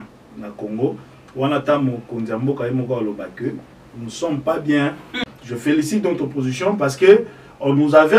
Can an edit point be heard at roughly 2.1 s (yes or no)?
no